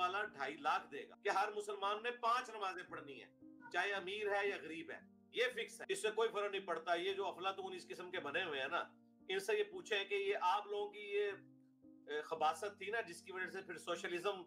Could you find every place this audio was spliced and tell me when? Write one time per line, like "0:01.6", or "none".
0:01.0
0:05.8